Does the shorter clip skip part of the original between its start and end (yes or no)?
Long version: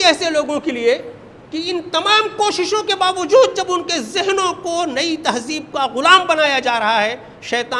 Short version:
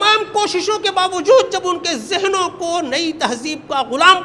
no